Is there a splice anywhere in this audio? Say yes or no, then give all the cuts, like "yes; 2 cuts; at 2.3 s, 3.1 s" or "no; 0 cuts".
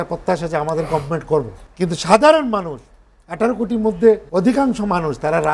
yes; 2 cuts; at 1.6 s, 4.3 s